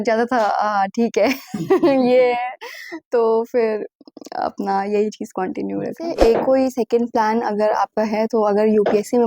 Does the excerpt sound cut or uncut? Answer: cut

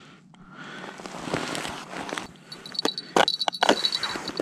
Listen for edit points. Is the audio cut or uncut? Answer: cut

